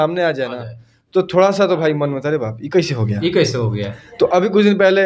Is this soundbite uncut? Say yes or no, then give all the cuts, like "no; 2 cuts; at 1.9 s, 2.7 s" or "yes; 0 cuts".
yes; 0 cuts